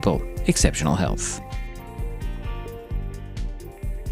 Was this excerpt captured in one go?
no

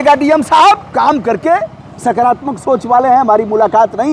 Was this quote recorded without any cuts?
yes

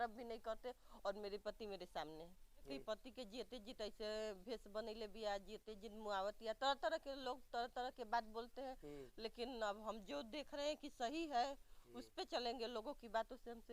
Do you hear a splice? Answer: yes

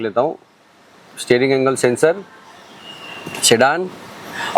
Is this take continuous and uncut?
yes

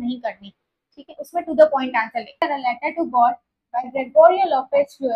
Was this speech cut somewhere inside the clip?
yes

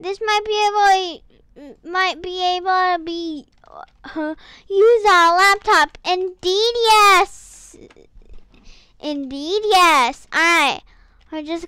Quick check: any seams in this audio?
no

